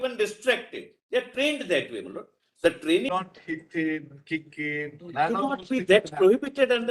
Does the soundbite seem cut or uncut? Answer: cut